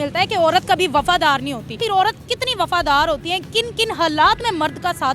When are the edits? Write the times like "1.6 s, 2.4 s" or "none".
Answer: 1.8 s